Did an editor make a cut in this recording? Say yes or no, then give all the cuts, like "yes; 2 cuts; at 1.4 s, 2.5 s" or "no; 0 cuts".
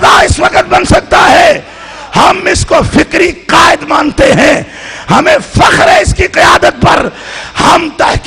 no; 0 cuts